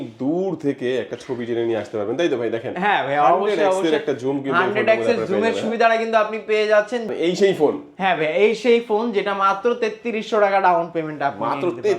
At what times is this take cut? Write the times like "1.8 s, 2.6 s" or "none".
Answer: 7.1 s